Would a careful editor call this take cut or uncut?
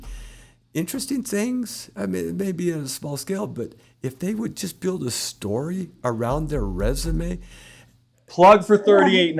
cut